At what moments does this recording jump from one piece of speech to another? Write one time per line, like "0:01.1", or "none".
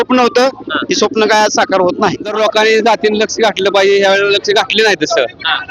0:02.3